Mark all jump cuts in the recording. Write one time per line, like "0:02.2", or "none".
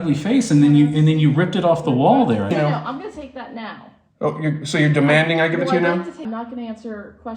0:02.5
0:06.2